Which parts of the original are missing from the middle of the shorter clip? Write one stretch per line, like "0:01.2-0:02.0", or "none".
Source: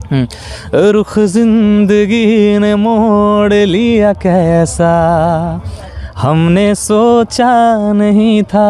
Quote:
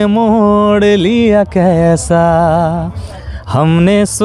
none